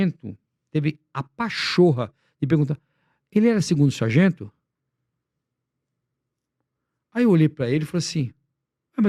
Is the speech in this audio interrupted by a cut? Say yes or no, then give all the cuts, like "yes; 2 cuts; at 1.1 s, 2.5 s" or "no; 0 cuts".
no; 0 cuts